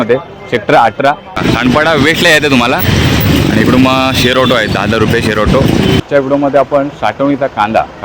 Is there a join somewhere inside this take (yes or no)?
yes